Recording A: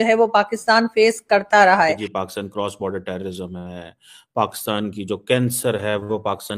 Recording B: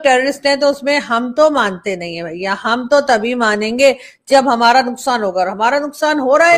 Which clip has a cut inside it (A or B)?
A